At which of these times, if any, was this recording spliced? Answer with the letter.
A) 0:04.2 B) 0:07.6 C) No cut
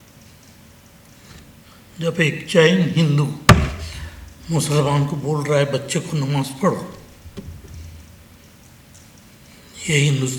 C